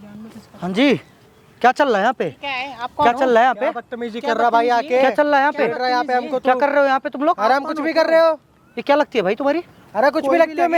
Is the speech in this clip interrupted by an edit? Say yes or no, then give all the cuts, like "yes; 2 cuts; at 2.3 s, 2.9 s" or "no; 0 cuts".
no; 0 cuts